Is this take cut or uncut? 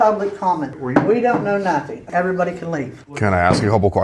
uncut